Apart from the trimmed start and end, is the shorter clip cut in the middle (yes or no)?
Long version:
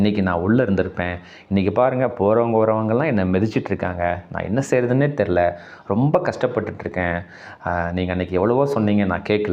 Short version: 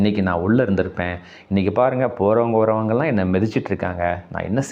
no